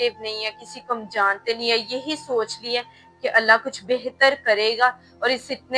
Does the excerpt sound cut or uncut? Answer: uncut